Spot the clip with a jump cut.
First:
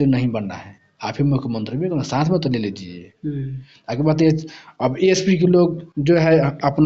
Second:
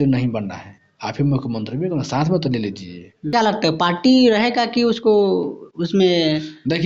second; 1 cut; at 3.3 s

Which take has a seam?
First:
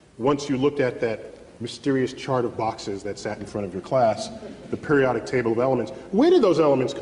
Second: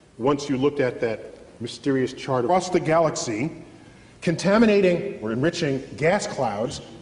first; 1 cut; at 2.5 s

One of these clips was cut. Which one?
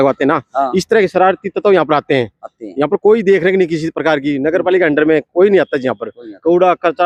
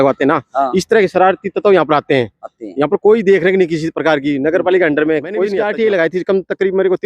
second; 1 cut; at 5.5 s

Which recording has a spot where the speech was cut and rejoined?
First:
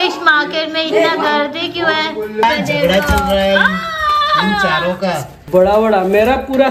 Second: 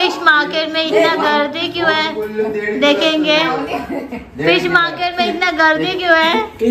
first; 2 cuts; at 2.4 s, 5.3 s

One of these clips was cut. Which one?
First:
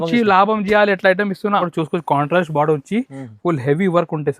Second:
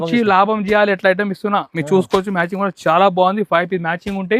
first; 1 cut; at 1.7 s

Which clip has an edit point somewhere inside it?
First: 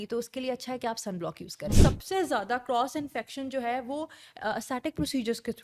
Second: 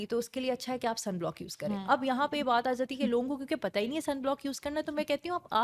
first; 1 cut; at 1.8 s

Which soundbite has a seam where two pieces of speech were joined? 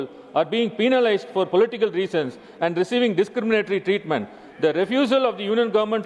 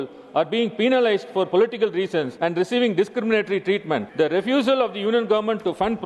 second; 2 cuts; at 2.3 s, 4.1 s

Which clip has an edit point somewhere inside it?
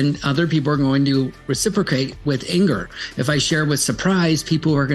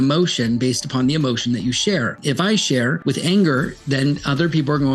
second; 2 cuts; at 2.2 s, 3.0 s

